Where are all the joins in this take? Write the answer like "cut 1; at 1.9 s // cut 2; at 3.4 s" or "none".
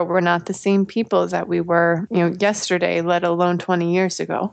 cut 1; at 2.0 s